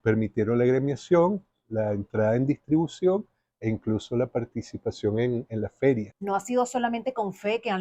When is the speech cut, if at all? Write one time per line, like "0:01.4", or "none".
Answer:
0:06.1

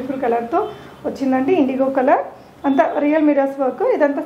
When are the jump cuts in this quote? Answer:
none

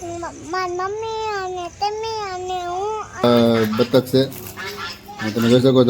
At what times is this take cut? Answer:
0:03.2

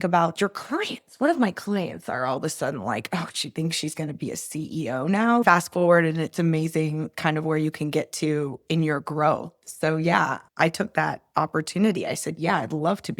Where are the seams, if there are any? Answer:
0:05.4

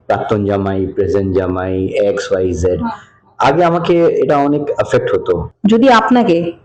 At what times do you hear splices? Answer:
0:05.5

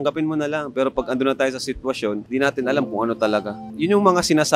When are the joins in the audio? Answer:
0:02.2
0:03.7

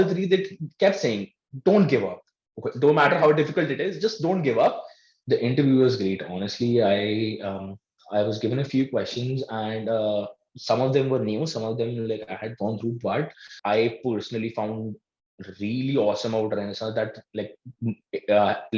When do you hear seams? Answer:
0:05.1
0:13.5

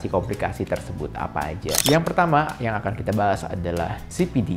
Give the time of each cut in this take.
0:01.8

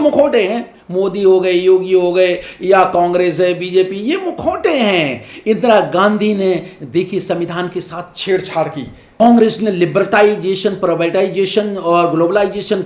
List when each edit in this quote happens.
0:09.2

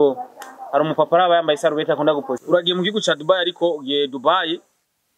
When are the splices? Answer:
0:02.4

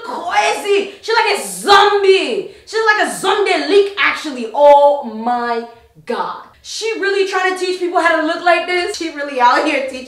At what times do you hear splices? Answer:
none

